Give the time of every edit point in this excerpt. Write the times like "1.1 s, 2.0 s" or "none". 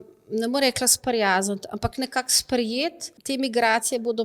3.1 s